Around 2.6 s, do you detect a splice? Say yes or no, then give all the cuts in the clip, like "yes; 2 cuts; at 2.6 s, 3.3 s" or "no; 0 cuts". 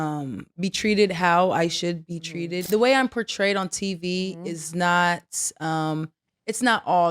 yes; 1 cut; at 2.6 s